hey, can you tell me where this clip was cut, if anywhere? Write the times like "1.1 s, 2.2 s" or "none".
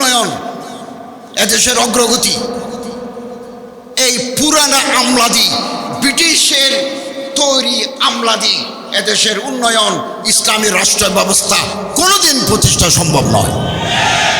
none